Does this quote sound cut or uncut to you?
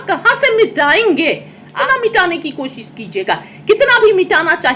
cut